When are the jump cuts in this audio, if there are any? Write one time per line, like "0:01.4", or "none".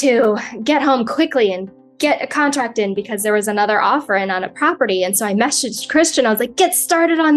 0:05.8